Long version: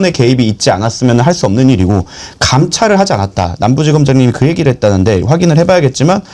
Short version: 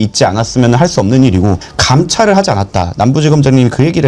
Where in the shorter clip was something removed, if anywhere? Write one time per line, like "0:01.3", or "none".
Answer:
0:01.7